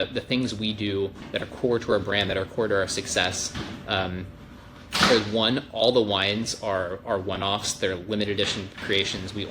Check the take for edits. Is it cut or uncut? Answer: uncut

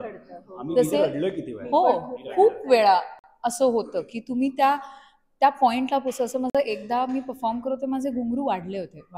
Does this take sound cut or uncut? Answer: uncut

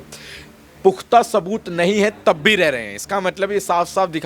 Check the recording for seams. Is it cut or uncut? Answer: uncut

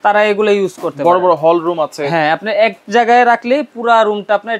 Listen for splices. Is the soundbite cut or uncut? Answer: uncut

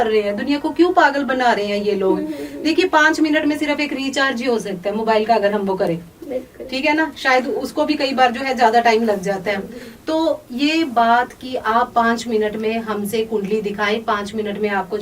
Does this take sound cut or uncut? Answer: uncut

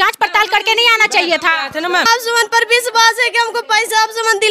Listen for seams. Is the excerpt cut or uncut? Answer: cut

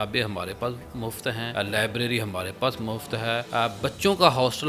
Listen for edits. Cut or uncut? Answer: cut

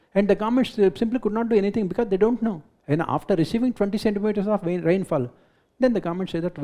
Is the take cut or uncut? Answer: cut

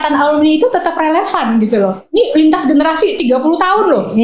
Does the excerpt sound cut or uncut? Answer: uncut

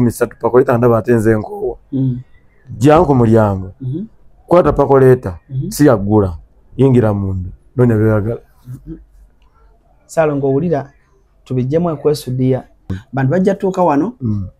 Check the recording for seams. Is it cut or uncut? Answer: cut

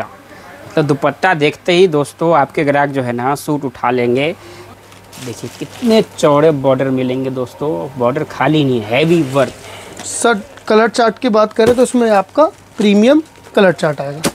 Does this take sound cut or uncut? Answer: cut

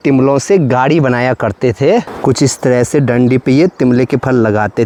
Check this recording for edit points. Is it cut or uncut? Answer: uncut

